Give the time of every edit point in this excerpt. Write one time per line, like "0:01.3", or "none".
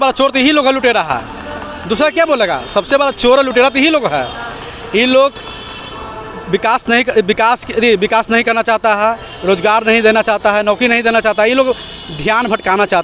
none